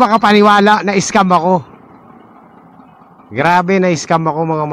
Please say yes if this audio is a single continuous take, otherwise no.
yes